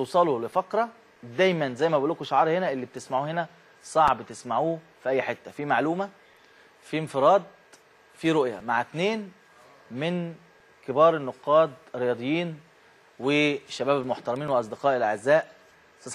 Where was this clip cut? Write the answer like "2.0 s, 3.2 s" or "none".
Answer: 13.1 s